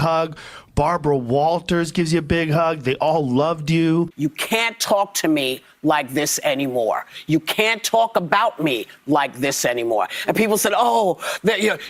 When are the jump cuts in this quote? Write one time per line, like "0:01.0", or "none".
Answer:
0:04.1